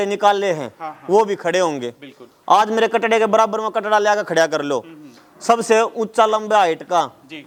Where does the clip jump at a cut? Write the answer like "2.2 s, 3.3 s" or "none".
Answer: none